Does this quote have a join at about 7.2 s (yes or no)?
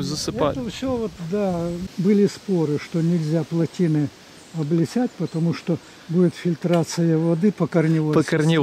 no